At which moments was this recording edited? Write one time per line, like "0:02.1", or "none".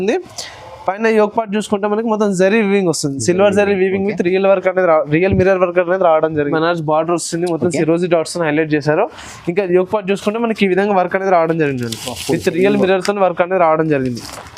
0:06.5